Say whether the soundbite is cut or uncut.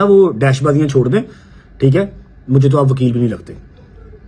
uncut